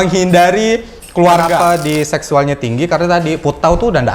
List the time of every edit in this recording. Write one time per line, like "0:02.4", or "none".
0:01.6